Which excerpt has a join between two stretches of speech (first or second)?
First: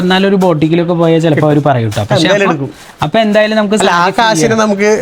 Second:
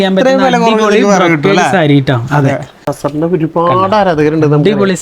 second